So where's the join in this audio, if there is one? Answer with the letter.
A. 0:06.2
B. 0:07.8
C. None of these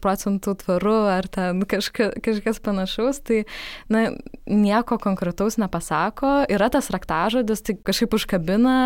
B